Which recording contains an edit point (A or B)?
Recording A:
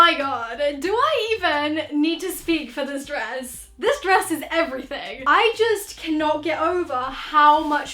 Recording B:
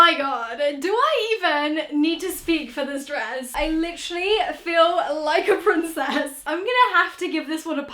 B